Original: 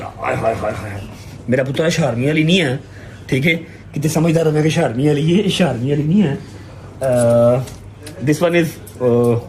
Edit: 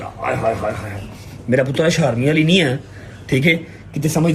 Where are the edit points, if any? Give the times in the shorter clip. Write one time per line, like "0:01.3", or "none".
none